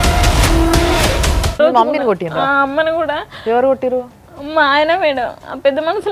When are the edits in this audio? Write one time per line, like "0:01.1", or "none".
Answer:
none

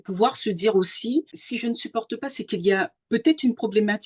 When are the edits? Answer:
0:01.4

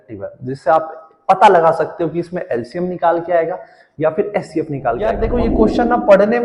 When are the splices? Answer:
0:05.2

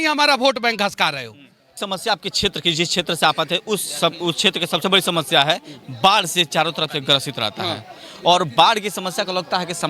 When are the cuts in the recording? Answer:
0:01.8

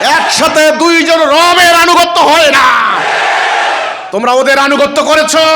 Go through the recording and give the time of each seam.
0:04.0

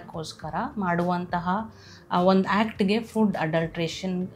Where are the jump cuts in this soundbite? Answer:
none

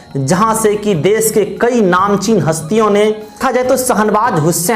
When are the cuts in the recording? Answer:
0:03.4

